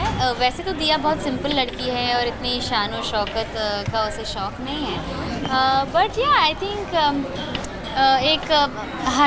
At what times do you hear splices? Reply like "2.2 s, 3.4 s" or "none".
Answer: none